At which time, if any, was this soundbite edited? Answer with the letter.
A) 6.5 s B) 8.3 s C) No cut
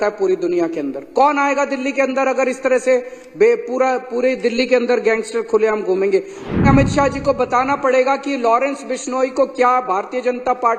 A